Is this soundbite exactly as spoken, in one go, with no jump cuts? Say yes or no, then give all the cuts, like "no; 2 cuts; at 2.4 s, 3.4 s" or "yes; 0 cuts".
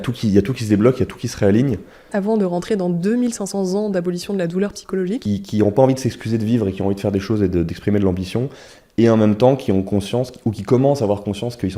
no; 2 cuts; at 2.1 s, 5.2 s